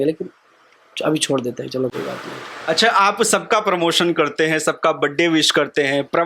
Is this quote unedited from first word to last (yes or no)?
yes